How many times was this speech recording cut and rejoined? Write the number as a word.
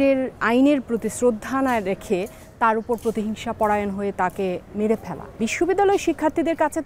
one